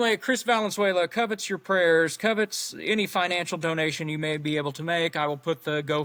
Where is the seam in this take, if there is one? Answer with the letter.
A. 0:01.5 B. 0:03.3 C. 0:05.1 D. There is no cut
D